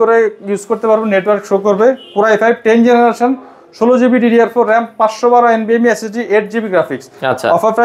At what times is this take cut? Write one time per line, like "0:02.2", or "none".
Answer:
none